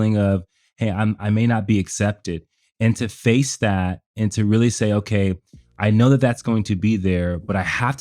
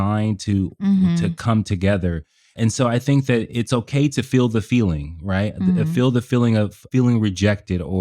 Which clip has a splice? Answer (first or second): second